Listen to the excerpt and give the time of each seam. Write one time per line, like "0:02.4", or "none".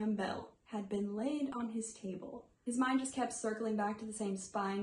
none